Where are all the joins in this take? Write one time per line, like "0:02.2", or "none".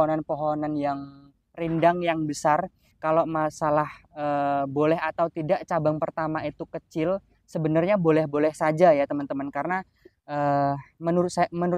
0:02.8